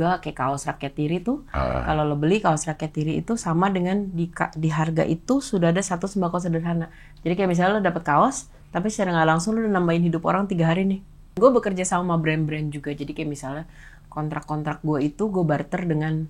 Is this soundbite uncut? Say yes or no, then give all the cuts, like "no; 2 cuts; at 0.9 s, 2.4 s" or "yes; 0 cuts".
no; 1 cut; at 11.4 s